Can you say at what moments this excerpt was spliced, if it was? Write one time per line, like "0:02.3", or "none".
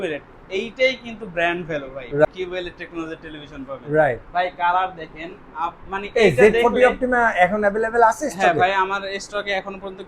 0:02.2